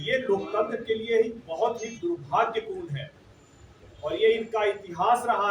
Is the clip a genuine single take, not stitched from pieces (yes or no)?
yes